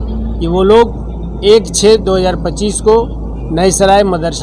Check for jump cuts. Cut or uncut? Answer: uncut